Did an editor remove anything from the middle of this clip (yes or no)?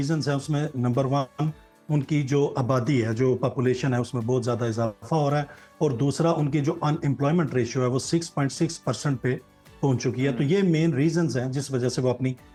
no